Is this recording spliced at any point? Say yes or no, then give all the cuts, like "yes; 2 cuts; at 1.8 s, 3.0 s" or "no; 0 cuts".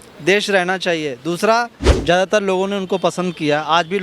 yes; 1 cut; at 2.0 s